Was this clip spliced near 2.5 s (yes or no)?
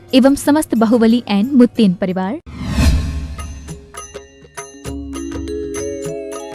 yes